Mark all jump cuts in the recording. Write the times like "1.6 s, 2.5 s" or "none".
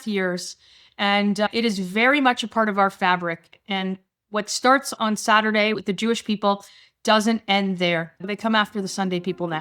4.9 s, 8.2 s